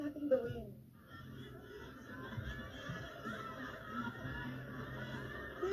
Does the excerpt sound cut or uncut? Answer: uncut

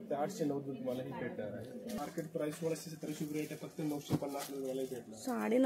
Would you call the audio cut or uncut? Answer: cut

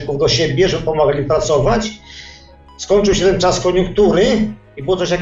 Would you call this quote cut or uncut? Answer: uncut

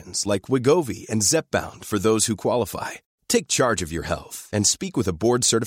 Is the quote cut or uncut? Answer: uncut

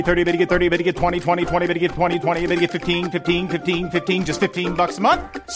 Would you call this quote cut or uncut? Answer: uncut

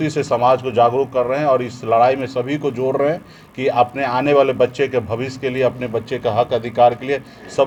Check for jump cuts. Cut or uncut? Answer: uncut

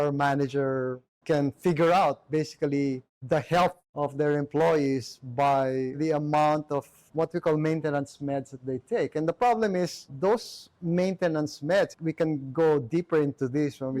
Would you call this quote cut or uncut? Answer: cut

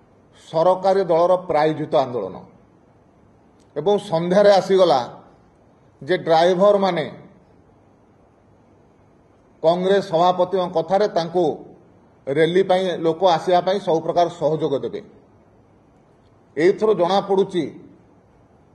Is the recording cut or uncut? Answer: uncut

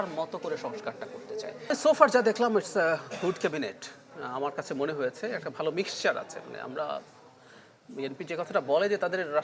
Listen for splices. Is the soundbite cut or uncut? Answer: cut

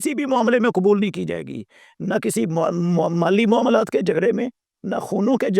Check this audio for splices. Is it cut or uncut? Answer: uncut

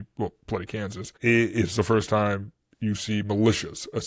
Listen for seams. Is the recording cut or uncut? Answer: cut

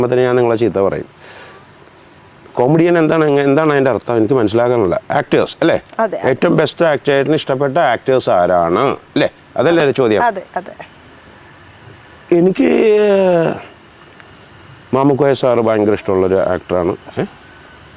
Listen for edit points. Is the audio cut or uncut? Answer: uncut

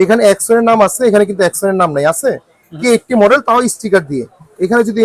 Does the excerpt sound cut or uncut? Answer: uncut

